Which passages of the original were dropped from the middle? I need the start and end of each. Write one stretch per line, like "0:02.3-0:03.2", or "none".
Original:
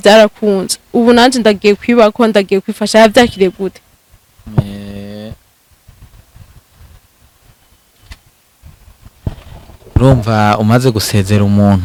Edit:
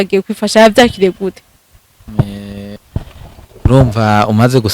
0:05.1-0:09.1